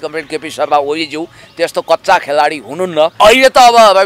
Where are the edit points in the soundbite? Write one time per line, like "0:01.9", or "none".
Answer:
0:03.1